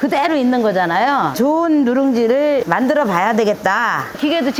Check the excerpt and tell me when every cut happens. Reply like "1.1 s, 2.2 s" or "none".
none